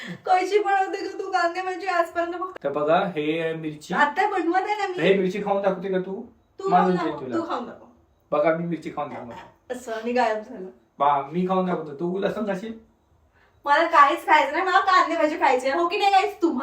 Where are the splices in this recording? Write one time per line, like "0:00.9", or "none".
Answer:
0:02.5

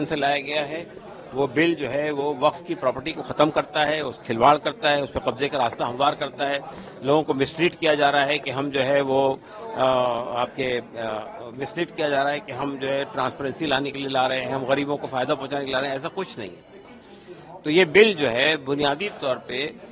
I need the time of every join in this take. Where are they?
none

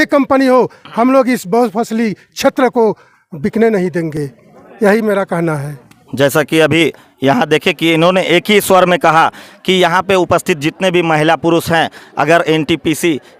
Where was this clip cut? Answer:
none

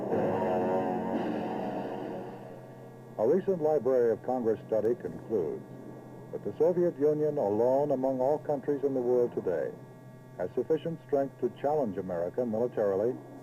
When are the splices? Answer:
0:04.6

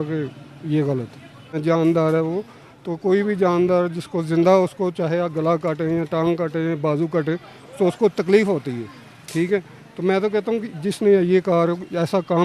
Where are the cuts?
0:01.6

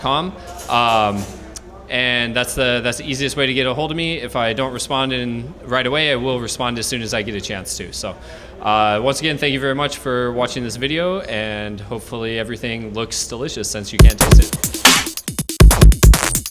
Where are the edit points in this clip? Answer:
0:13.9

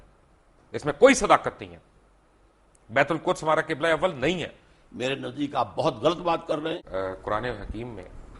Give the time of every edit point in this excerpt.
0:06.8

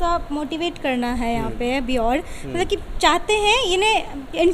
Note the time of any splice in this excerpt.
none

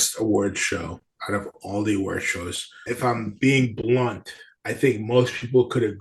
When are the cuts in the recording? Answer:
none

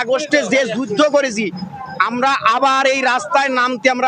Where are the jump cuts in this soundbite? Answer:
none

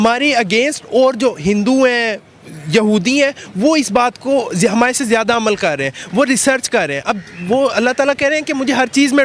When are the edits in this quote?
none

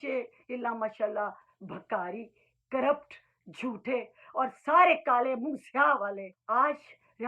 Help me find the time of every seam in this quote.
0:06.3

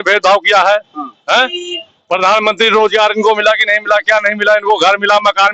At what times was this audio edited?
none

